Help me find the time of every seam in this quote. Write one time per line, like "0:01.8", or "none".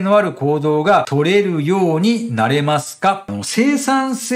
0:01.1
0:03.3